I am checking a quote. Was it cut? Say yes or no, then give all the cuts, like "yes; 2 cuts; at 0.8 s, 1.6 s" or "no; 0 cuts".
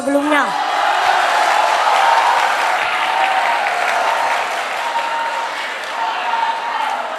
no; 0 cuts